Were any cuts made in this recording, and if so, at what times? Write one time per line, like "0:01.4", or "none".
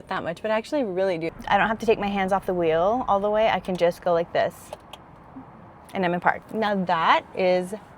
0:01.3
0:06.4